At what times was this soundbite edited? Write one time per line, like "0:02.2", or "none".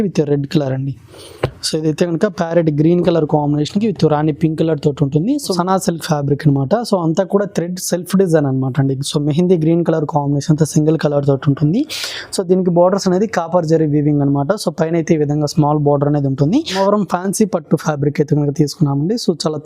0:05.5
0:16.7